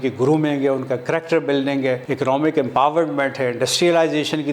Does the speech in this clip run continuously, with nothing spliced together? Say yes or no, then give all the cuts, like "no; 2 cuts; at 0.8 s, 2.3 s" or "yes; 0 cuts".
no; 1 cut; at 2.1 s